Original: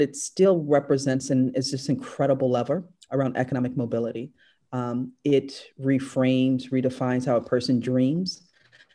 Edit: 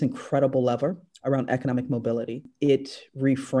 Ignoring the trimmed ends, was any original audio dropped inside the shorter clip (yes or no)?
yes